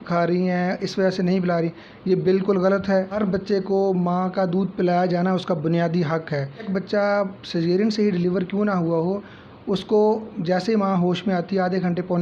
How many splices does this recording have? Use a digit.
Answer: 2